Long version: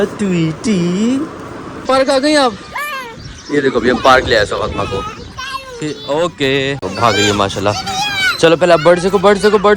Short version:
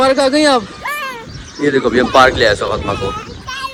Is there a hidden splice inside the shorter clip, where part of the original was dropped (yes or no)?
no